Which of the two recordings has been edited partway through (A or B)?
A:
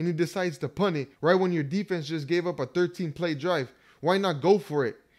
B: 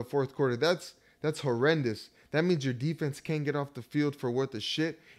A